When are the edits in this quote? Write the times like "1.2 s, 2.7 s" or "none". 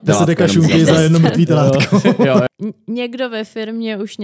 2.5 s